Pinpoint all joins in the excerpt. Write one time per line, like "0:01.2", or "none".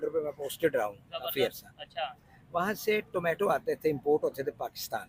none